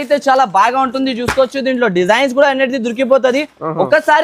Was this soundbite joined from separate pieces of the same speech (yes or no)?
no